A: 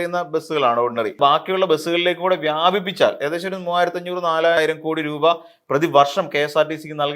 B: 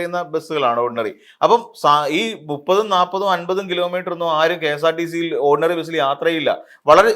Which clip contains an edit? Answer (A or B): A